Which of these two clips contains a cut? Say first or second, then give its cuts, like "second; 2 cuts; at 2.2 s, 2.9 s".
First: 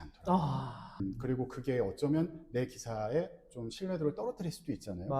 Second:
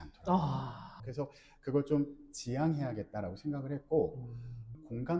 second; 1 cut; at 1.0 s